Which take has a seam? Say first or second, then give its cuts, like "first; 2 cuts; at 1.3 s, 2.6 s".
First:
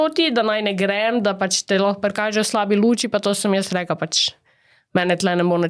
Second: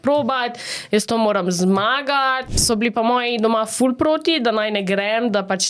second; 1 cut; at 2.5 s